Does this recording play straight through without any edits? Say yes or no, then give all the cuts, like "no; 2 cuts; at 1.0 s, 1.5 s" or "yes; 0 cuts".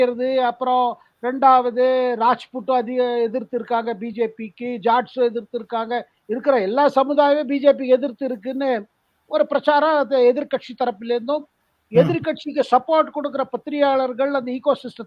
yes; 0 cuts